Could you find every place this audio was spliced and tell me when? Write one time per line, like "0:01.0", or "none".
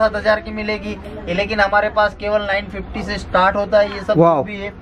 none